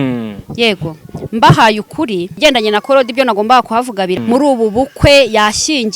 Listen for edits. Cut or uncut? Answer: cut